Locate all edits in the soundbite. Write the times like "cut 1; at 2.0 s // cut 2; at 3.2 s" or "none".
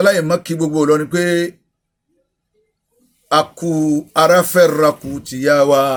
none